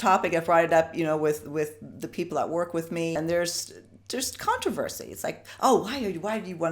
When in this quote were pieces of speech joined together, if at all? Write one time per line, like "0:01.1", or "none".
0:03.1